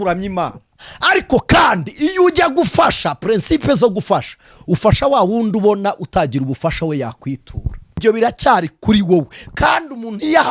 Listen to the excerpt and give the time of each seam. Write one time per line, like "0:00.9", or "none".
0:08.0

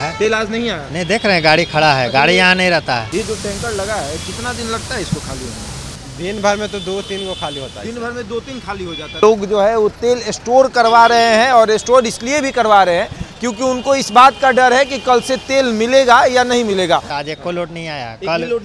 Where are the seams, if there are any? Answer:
0:03.1
0:06.0
0:09.2
0:17.1

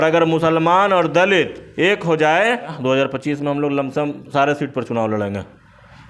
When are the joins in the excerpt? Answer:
0:02.7

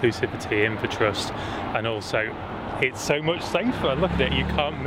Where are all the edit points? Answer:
none

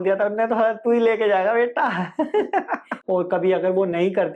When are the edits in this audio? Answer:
0:02.9

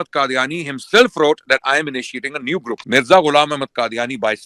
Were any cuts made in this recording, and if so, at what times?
0:02.8

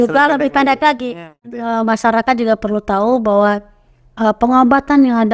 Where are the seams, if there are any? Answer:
0:01.3

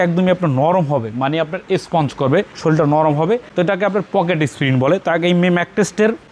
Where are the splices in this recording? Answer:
none

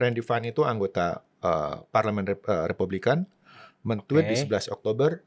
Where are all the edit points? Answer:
none

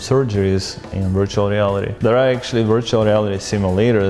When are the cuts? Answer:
0:01.9

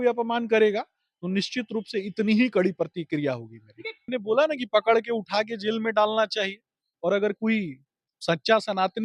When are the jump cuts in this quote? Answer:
0:04.0

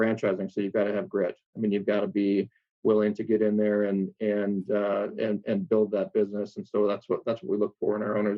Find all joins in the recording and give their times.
none

